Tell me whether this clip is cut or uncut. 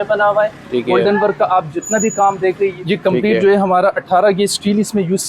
cut